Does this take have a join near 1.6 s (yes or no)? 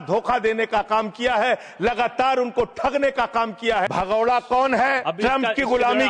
no